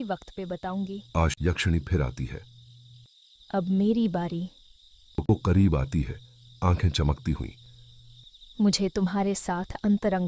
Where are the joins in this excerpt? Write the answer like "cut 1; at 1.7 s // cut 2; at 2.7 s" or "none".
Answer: cut 1; at 1.3 s // cut 2; at 5.3 s